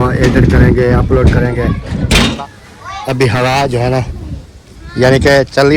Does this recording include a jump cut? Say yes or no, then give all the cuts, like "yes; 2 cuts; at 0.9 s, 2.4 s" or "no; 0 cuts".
yes; 1 cut; at 2.4 s